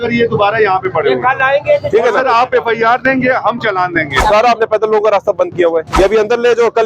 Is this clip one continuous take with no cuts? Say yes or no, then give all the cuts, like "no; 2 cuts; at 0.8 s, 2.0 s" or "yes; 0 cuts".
no; 2 cuts; at 4.2 s, 5.9 s